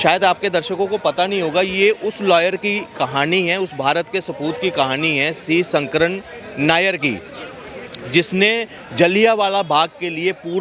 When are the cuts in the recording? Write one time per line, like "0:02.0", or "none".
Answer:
none